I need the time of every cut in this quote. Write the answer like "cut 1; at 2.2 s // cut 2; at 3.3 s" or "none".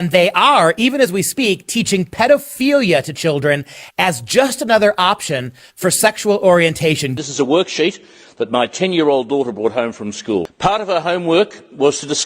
cut 1; at 7.1 s // cut 2; at 10.5 s